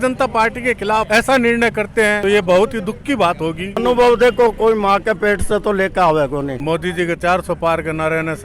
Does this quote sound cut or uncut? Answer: cut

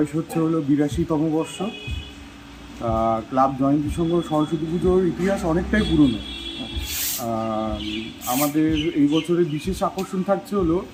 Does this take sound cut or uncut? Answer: uncut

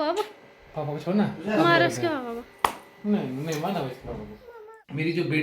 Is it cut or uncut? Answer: cut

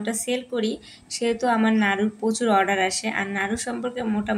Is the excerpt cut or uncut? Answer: uncut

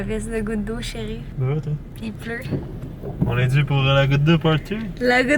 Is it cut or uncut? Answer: cut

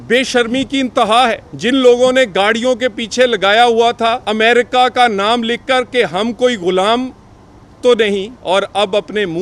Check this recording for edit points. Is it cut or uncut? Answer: cut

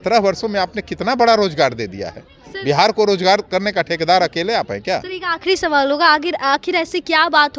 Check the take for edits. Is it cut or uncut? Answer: uncut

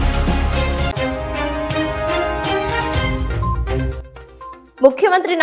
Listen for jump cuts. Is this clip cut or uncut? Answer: cut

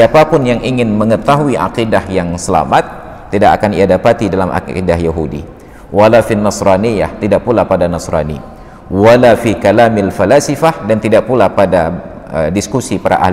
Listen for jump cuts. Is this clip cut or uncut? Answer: uncut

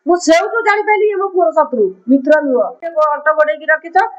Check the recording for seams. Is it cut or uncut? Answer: cut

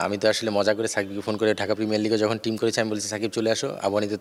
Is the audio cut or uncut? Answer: uncut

